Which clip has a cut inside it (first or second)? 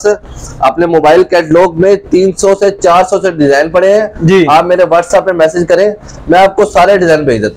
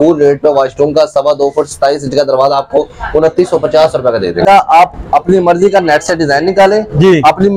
second